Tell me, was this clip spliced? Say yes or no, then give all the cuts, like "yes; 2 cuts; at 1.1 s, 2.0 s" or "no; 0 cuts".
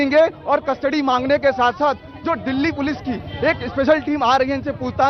no; 0 cuts